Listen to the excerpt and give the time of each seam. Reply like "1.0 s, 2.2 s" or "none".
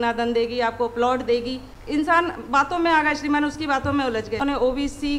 1.7 s, 4.4 s